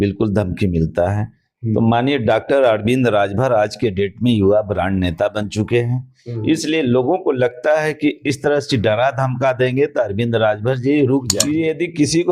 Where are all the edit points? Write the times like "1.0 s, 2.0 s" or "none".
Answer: 11.4 s